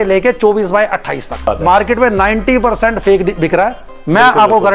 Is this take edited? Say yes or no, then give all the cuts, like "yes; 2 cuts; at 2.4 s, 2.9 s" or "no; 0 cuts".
yes; 1 cut; at 1.5 s